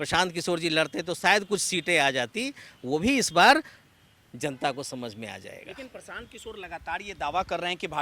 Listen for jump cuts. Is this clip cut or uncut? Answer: uncut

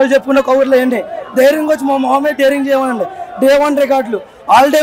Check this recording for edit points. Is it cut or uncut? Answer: uncut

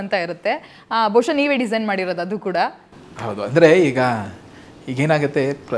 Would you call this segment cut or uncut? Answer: uncut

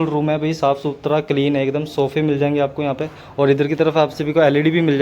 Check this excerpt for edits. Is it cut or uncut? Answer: uncut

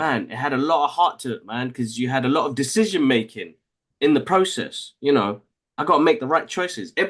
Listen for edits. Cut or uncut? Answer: uncut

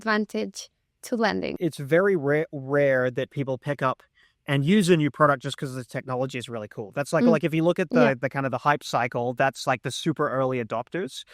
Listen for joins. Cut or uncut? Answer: cut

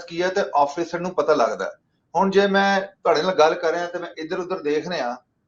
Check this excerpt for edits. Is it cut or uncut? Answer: uncut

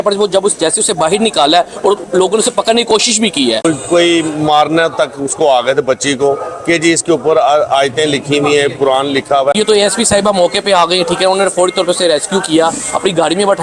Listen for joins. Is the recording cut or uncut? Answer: cut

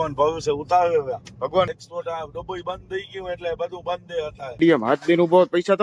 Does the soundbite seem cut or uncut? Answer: cut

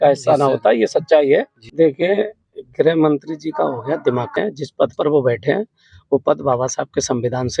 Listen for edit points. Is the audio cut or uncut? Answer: cut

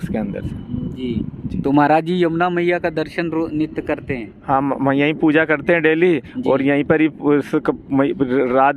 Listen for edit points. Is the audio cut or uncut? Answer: cut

